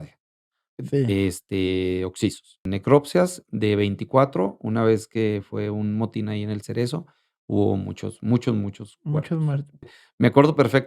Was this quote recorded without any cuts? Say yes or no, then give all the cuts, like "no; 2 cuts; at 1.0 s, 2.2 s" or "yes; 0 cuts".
no; 2 cuts; at 2.7 s, 9.9 s